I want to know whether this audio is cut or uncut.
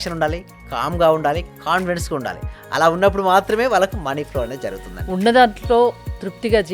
uncut